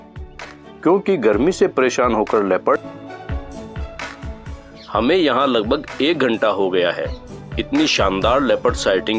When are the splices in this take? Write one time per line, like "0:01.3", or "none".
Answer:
0:02.8

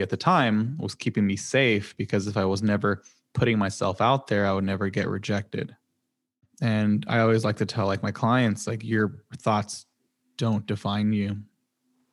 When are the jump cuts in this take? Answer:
0:06.4

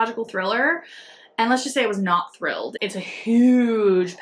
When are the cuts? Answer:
0:02.8

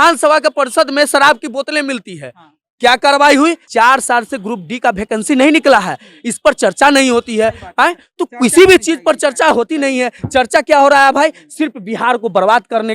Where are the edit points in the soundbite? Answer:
0:03.6

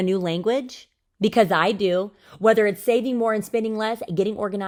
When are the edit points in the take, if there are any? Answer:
none

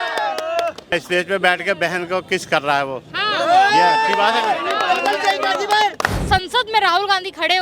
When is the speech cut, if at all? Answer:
0:01.0
0:06.2

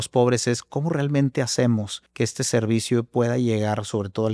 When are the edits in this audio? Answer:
0:02.0

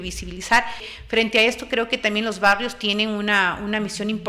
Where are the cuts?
0:00.9

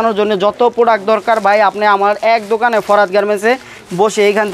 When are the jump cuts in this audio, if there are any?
none

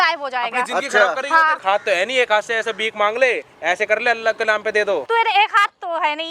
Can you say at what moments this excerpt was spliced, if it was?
0:01.6
0:05.0

